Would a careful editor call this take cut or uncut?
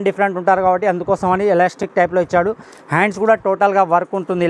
uncut